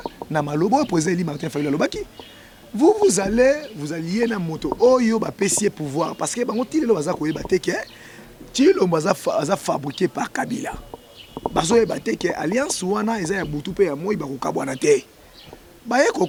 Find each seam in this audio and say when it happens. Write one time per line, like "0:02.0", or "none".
none